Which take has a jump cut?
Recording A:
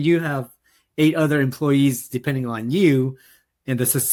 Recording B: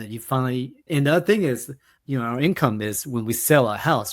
B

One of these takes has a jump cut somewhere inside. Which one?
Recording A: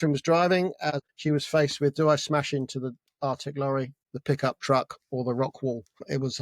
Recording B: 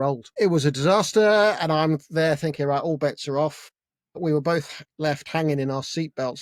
A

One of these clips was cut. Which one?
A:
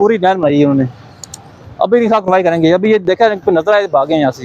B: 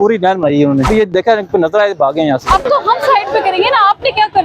B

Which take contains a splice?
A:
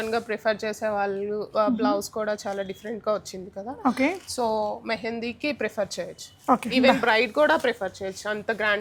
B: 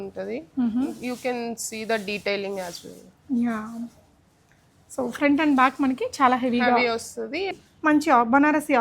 B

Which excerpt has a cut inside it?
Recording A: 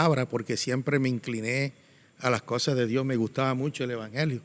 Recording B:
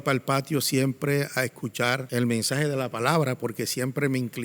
B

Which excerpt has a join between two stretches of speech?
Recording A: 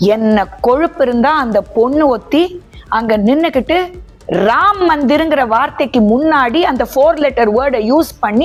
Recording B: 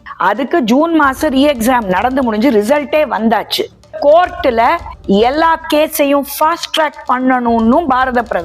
B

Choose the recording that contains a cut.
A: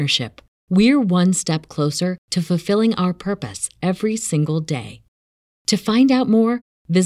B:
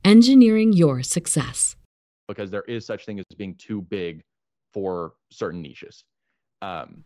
B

